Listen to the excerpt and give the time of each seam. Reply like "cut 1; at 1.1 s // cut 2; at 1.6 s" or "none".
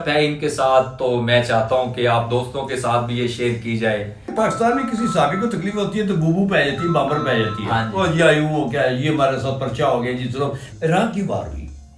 cut 1; at 4.2 s // cut 2; at 10.6 s